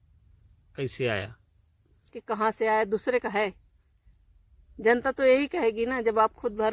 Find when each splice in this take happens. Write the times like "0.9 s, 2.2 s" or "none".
2.2 s

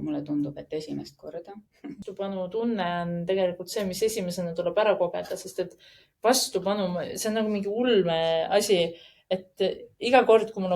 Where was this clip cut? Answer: 2.0 s

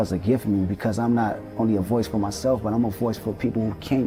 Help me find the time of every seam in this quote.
none

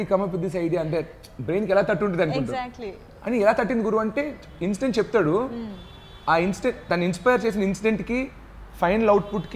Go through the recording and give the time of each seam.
none

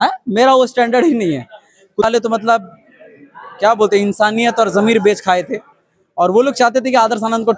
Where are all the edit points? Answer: 2.0 s

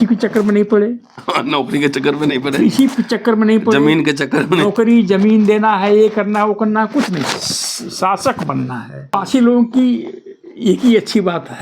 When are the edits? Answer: 9.1 s

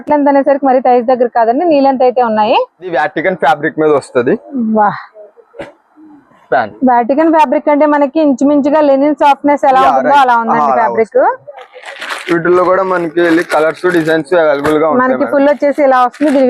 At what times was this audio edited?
2.9 s

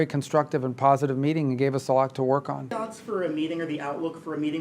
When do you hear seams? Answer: 2.7 s

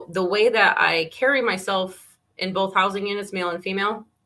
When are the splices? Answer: none

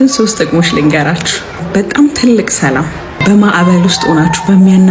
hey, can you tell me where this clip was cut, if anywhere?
1.7 s, 3.2 s

